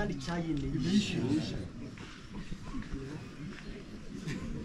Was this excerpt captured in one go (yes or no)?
yes